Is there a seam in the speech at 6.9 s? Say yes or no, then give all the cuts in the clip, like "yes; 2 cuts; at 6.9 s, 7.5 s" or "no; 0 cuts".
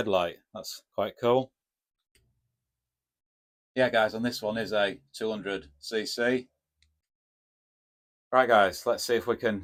no; 0 cuts